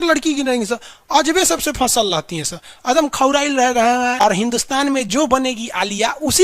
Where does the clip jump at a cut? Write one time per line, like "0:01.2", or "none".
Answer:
0:04.1